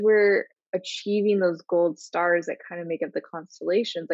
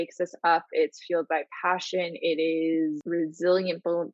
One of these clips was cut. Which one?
second; 1 cut; at 3.0 s

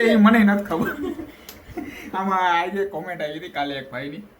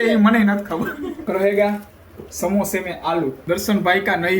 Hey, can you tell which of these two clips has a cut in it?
second; 2 cuts; at 1.2 s, 3.4 s

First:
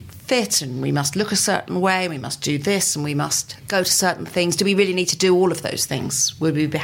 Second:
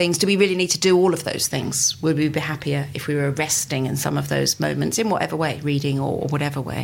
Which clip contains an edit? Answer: first; 1 cut; at 3.5 s

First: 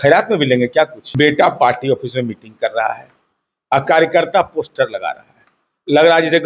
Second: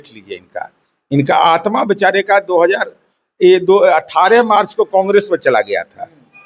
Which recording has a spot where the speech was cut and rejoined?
first; 1 cut; at 1.0 s

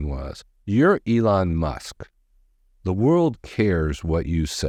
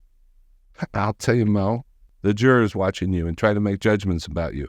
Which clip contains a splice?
second; 1 cut; at 2.1 s

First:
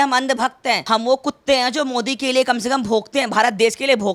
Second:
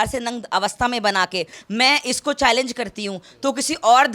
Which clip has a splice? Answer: second; 1 cut; at 1.6 s

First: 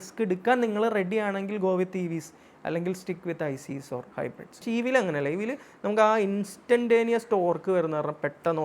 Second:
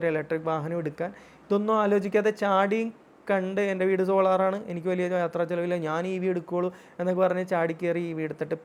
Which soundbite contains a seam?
first; 1 cut; at 4.6 s

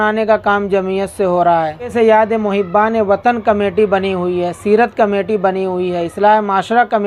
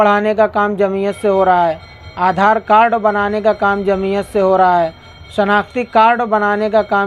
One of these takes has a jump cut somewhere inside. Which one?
first; 1 cut; at 1.9 s

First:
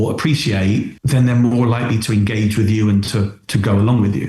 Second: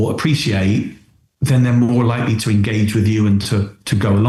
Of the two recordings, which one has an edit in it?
first; 1 cut; at 1.0 s

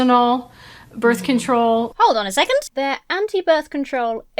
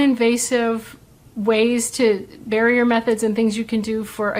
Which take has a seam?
first; 2 cuts; at 1.9 s, 2.7 s

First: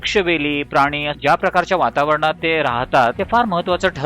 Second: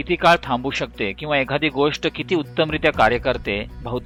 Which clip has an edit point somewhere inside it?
first; 2 cuts; at 1.1 s, 3.2 s

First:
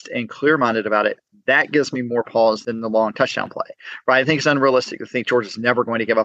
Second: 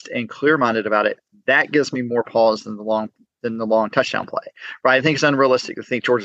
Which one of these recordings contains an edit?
first; 1 cut; at 2.6 s

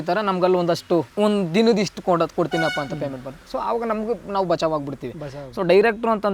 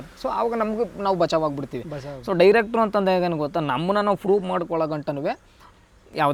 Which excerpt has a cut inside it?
first; 1 cut; at 1.1 s

